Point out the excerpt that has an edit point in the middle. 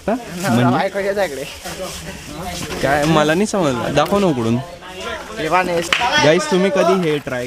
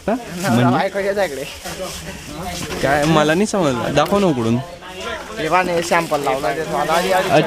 first; 1 cut; at 5.9 s

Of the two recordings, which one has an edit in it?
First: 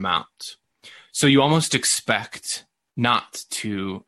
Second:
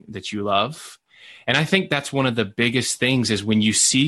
second; 1 cut; at 1.0 s

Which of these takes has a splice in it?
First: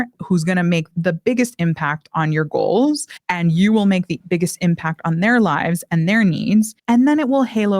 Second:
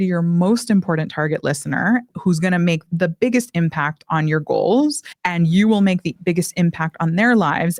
first; 1 cut; at 6.8 s

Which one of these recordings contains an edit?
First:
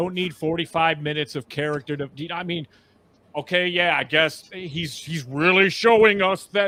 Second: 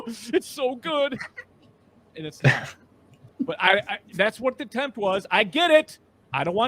second; 1 cut; at 3.3 s

